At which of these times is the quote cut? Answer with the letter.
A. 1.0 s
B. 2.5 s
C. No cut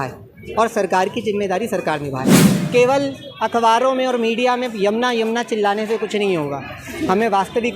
B